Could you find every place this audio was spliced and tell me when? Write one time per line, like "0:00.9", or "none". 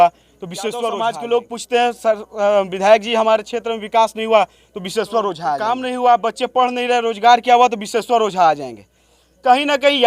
0:00.9
0:05.6